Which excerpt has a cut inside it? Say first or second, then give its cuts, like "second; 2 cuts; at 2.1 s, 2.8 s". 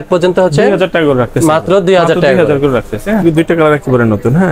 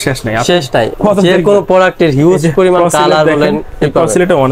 first; 1 cut; at 3.2 s